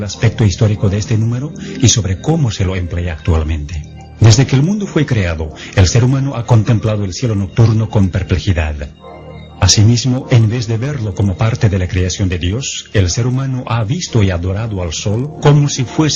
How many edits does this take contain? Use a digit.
1